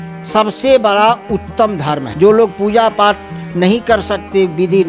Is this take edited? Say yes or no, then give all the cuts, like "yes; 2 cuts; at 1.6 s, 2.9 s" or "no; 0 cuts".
yes; 1 cut; at 2.1 s